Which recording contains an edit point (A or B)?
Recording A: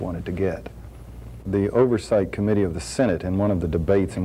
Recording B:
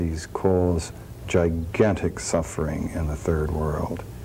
A